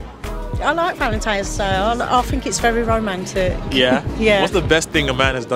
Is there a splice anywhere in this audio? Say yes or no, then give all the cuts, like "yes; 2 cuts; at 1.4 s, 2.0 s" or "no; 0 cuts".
no; 0 cuts